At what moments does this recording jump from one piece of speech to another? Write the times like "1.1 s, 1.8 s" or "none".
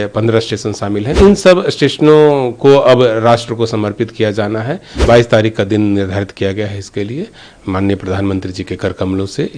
1.2 s, 4.9 s